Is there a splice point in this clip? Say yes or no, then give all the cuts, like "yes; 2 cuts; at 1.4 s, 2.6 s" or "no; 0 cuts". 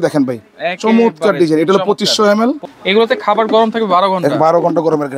yes; 1 cut; at 2.7 s